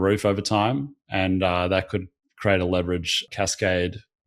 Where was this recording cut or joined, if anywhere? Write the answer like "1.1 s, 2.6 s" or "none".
3.2 s